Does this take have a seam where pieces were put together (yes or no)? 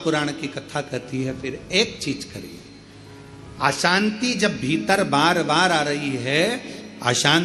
no